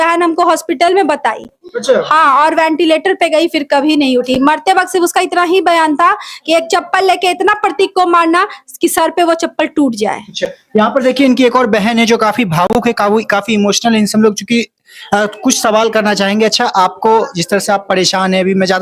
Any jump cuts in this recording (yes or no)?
no